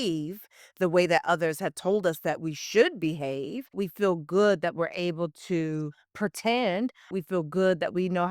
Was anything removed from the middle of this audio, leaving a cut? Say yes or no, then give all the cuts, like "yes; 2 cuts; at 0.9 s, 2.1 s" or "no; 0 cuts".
yes; 2 cuts; at 3.8 s, 7.1 s